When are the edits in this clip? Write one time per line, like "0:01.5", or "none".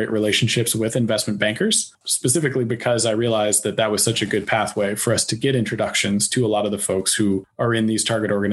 0:02.0
0:07.5